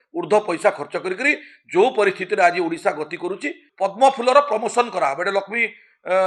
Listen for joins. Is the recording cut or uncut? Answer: cut